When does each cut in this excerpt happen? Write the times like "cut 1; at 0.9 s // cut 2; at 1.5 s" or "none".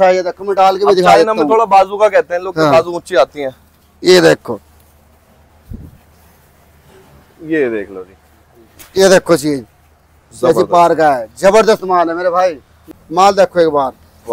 cut 1; at 12.8 s